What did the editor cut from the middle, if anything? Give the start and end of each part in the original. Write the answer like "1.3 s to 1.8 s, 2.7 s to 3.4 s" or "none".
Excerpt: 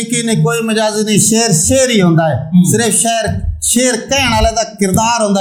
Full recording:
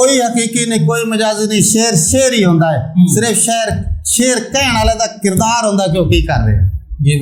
none